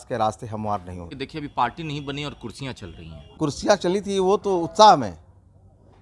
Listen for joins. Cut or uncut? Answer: cut